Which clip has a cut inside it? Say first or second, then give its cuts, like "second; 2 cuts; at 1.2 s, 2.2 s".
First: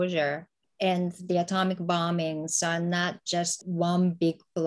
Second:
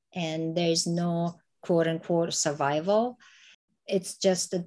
first; 1 cut; at 3.6 s